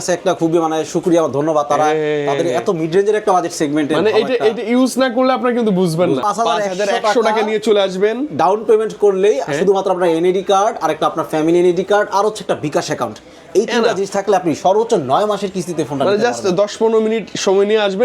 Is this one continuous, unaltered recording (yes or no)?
no